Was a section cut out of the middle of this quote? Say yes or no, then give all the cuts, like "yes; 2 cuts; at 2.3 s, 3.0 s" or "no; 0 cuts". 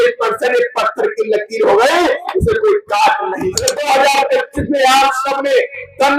yes; 1 cut; at 3.7 s